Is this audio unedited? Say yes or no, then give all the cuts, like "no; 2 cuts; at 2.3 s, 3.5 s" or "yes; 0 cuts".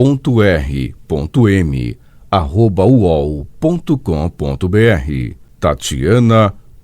no; 1 cut; at 4.9 s